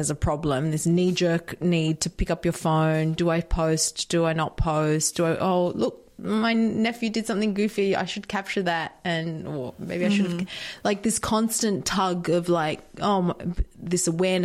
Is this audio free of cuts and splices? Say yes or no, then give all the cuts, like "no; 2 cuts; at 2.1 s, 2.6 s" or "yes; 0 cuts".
yes; 0 cuts